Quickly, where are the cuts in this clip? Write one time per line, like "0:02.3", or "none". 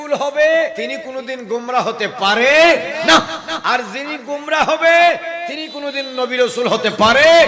0:00.9